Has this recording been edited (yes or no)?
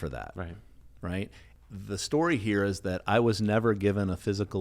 yes